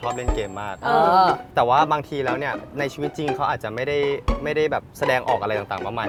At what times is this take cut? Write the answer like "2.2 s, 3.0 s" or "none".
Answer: none